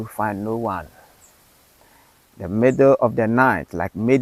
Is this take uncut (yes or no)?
yes